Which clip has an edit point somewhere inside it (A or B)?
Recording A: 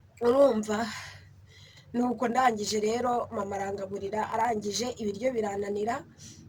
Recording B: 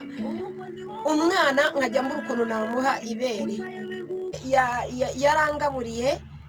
B